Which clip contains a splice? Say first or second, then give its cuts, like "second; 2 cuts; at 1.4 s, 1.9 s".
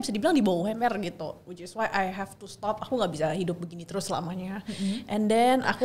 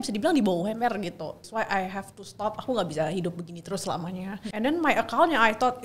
second; 2 cuts; at 1.4 s, 4.4 s